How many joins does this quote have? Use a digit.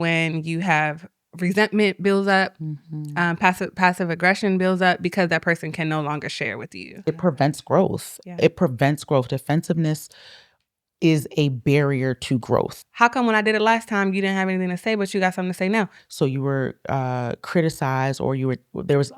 3